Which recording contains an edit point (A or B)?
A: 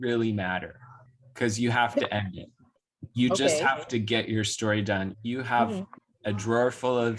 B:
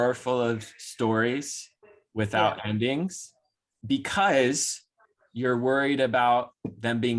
A